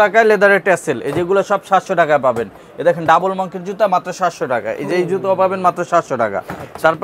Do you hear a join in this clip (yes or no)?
no